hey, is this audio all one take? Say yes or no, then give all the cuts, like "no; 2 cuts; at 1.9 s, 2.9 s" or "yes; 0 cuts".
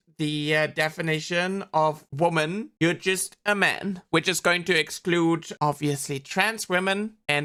yes; 0 cuts